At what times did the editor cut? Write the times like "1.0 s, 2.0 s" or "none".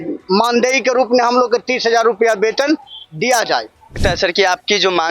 4.0 s